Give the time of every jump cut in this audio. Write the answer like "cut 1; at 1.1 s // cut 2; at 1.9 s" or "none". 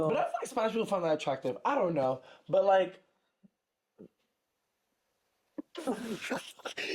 none